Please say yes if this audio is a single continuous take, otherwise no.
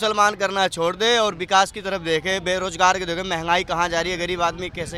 yes